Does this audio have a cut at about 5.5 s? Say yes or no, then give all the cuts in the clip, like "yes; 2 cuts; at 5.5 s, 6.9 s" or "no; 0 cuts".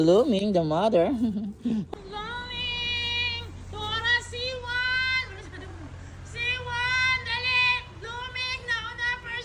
no; 1 cut; at 1.9 s